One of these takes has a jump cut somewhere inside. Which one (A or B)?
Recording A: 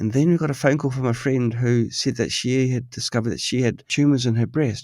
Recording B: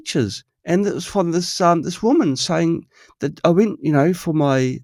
A